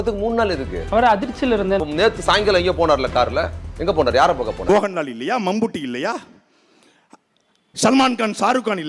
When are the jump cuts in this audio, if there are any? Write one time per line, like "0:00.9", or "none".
0:04.7